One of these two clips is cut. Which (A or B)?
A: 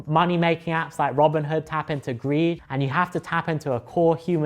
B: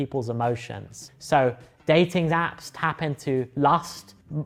A